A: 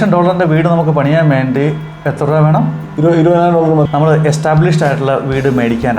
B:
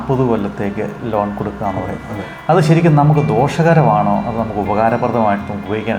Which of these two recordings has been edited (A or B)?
A